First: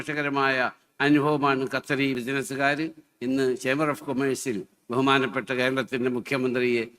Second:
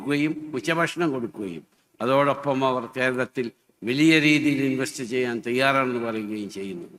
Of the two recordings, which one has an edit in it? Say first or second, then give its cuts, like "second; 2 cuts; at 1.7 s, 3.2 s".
first; 1 cut; at 2.2 s